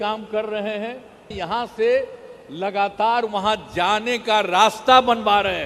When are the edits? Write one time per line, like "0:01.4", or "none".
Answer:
0:01.3